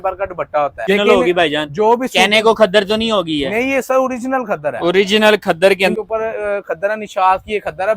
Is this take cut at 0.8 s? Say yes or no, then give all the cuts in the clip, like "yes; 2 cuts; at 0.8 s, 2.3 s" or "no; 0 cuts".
yes; 2 cuts; at 0.8 s, 5.9 s